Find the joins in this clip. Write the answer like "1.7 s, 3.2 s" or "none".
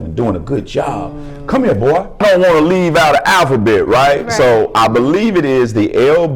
2.2 s